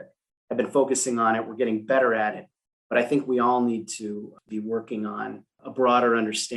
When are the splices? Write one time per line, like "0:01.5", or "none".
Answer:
0:04.4
0:05.5

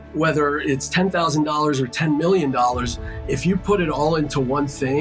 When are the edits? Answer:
none

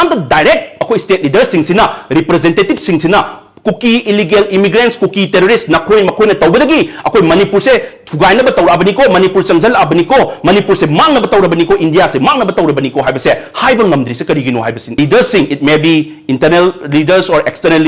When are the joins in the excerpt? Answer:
0:15.0

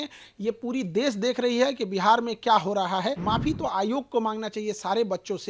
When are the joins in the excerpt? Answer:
0:03.2

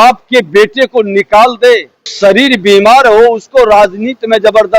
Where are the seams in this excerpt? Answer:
0:02.1

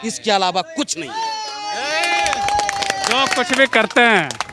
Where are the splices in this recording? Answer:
none

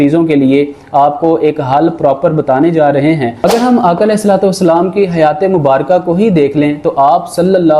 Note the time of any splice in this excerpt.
0:03.4

